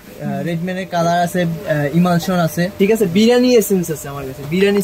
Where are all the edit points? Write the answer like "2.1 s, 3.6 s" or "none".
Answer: 2.7 s